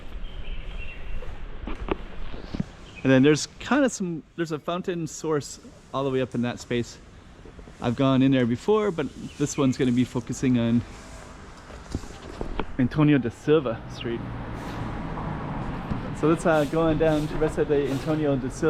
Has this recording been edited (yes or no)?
yes